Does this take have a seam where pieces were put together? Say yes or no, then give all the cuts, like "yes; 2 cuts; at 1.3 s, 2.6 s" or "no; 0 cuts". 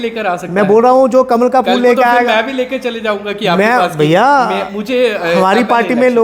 no; 0 cuts